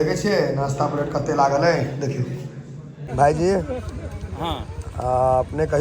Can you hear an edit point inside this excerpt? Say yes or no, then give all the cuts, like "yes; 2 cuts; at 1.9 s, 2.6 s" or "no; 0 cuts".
yes; 1 cut; at 3.0 s